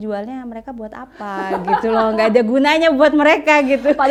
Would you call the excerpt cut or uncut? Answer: uncut